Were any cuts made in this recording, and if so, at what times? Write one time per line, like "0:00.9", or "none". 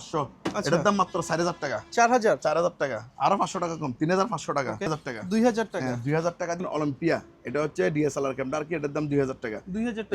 0:04.9
0:06.6